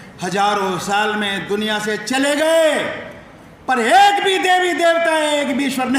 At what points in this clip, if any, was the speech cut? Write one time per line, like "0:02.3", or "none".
none